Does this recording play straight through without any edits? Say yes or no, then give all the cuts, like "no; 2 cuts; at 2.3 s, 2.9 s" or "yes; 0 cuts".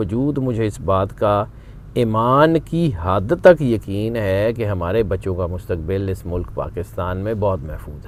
yes; 0 cuts